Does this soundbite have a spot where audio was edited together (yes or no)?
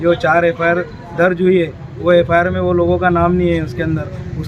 no